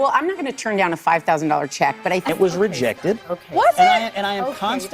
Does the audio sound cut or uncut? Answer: cut